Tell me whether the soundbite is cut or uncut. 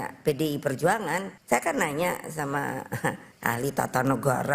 cut